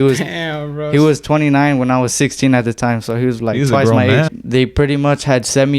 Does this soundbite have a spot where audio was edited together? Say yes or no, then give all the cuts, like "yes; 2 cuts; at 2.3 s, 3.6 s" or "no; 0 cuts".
yes; 1 cut; at 4.3 s